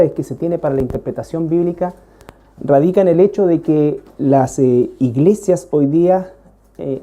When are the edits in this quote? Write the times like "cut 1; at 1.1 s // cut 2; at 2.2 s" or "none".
cut 1; at 6.0 s